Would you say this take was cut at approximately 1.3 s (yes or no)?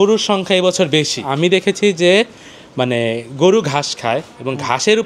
yes